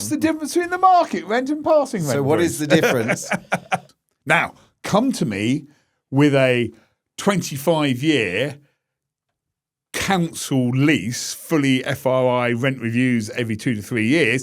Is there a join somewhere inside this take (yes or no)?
yes